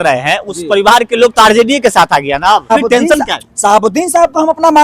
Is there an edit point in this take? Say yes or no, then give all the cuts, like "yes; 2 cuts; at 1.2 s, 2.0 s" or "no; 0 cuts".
yes; 1 cut; at 2.7 s